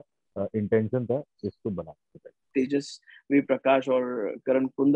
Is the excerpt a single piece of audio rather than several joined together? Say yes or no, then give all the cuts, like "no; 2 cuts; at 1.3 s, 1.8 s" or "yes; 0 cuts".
no; 1 cut; at 2.4 s